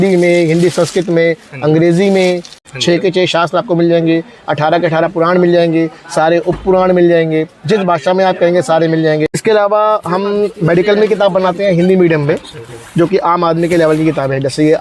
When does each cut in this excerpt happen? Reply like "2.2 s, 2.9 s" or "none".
2.6 s, 9.4 s